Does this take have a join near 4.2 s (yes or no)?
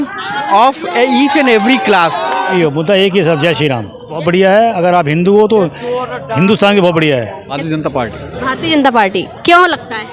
yes